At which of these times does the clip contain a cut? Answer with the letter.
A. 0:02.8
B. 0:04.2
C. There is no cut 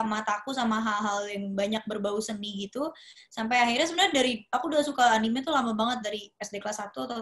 C